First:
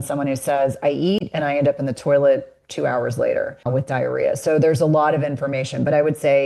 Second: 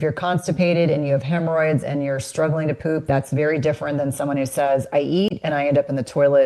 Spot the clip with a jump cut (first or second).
first